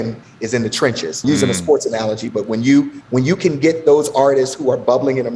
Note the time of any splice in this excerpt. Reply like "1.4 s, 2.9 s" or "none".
1.2 s